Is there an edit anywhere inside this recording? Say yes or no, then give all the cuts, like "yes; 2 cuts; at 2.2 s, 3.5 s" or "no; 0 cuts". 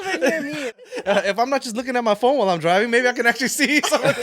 yes; 1 cut; at 0.9 s